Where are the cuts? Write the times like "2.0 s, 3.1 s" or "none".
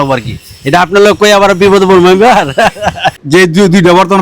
3.2 s